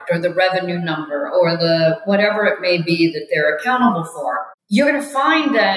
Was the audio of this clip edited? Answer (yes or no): yes